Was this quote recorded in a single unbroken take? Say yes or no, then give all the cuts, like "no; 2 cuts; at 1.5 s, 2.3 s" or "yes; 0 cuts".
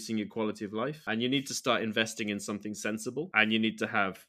no; 2 cuts; at 1.1 s, 3.3 s